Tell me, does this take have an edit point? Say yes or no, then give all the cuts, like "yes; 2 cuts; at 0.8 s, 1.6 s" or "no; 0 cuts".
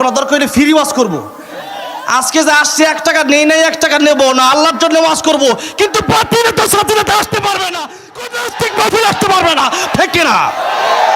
yes; 1 cut; at 9.9 s